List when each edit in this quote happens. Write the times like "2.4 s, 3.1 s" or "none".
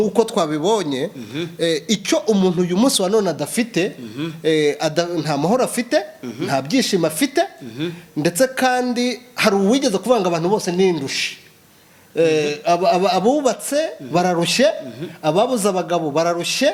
none

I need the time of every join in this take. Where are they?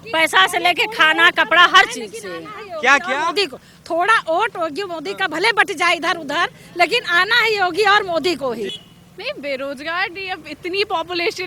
8.8 s

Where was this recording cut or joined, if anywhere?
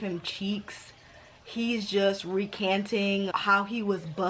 3.3 s

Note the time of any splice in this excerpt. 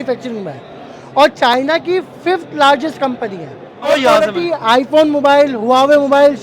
3.9 s

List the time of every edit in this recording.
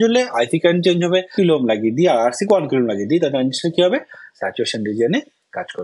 1.3 s

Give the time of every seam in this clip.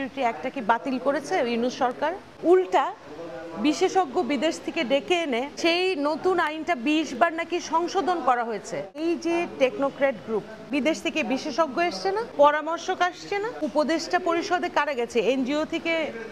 2.3 s, 5.5 s, 9.0 s, 10.6 s, 12.3 s, 13.6 s

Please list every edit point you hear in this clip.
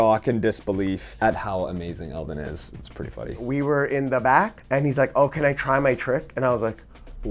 3.4 s, 4.6 s

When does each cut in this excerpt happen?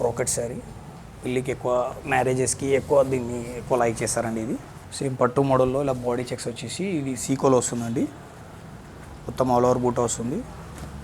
4.8 s

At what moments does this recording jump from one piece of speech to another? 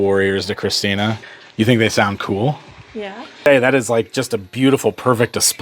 1.2 s, 3.4 s

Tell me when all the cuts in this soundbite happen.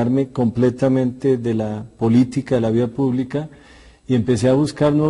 1.4 s

